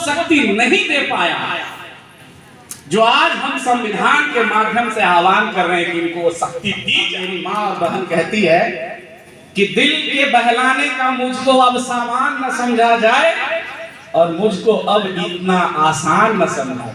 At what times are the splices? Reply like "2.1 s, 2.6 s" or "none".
7.2 s